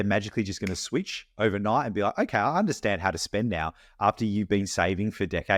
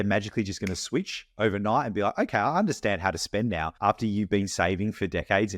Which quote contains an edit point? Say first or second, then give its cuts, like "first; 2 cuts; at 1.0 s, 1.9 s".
second; 1 cut; at 3.7 s